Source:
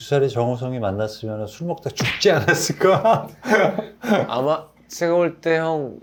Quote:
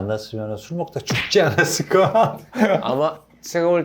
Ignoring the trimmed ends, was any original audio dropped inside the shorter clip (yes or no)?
yes